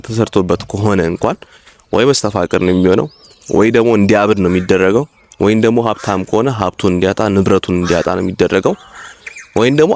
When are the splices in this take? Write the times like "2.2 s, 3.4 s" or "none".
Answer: none